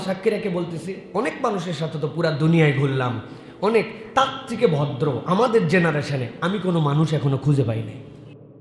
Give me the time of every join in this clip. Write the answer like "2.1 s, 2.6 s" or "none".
none